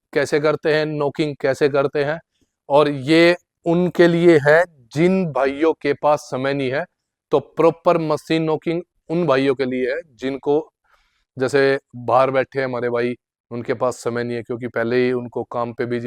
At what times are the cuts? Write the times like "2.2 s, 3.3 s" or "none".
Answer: none